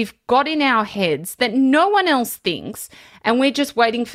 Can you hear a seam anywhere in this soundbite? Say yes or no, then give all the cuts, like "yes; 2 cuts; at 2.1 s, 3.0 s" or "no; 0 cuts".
no; 0 cuts